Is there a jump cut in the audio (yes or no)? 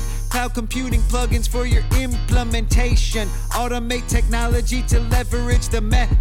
no